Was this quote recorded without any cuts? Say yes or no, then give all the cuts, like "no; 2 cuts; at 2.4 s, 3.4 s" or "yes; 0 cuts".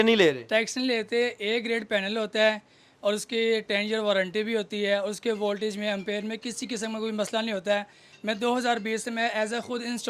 yes; 0 cuts